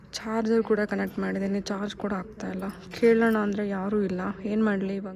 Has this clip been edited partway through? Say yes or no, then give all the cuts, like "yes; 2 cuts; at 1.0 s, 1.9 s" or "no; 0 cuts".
no; 0 cuts